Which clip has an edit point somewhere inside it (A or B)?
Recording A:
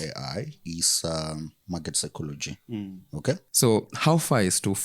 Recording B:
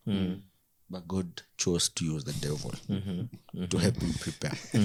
A